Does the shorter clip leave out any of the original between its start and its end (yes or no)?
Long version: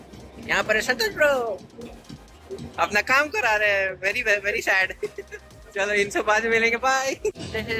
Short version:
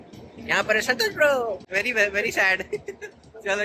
yes